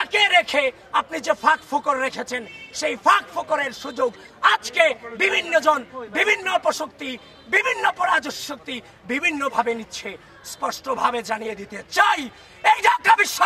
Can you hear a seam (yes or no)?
no